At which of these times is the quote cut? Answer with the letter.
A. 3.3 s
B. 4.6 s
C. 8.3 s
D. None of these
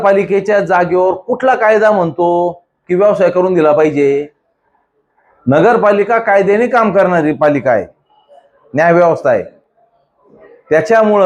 D